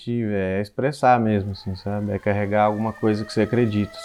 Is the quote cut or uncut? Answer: uncut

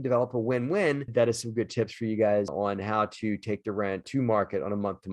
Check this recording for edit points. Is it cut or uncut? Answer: cut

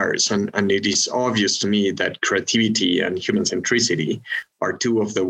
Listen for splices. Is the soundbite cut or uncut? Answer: uncut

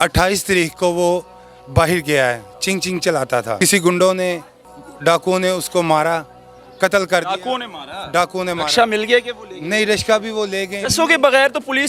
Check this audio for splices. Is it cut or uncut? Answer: cut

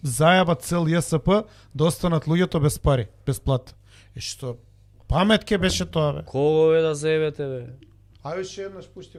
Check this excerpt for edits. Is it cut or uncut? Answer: uncut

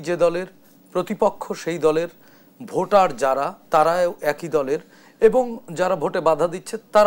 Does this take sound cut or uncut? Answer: uncut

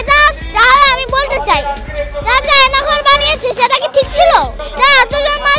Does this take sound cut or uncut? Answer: cut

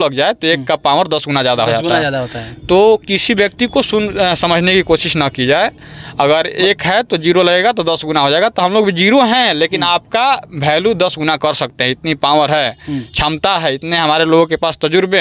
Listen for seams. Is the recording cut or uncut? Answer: uncut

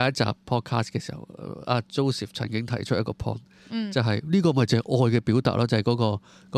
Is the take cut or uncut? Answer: uncut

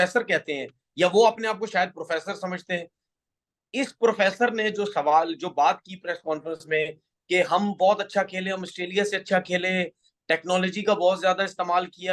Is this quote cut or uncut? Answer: uncut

